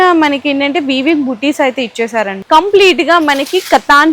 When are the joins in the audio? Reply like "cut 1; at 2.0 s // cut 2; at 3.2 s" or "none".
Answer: cut 1; at 2.4 s